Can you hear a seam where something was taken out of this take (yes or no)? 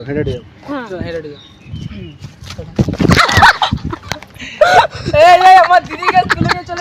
no